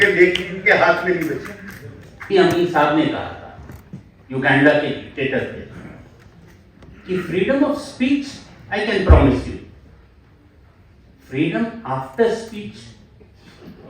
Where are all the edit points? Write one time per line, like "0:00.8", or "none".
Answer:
0:02.3